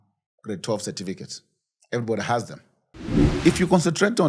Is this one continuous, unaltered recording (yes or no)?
no